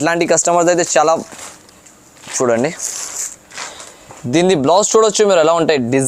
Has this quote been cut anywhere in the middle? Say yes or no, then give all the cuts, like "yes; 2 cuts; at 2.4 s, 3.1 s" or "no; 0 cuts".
no; 0 cuts